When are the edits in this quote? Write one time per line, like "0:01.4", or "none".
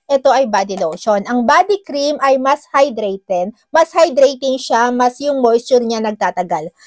none